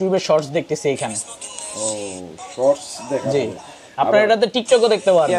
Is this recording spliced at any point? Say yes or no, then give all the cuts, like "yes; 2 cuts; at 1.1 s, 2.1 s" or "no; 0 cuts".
no; 0 cuts